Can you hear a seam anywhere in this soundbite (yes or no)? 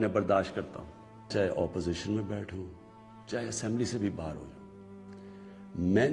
yes